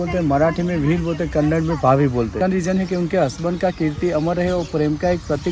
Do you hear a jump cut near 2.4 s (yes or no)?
yes